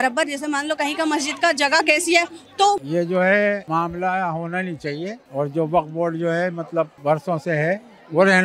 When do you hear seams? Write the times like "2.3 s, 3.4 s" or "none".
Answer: 2.8 s, 3.6 s, 5.2 s, 6.9 s